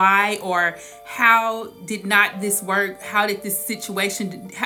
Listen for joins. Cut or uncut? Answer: uncut